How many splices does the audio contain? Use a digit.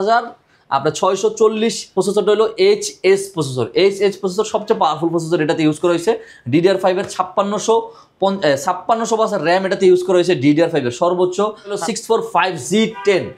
2